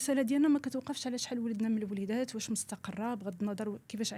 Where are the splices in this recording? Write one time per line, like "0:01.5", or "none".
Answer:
none